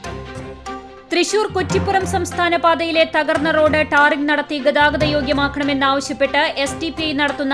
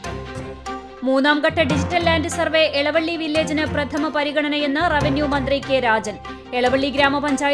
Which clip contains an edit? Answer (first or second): first